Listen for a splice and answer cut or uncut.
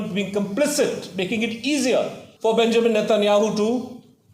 cut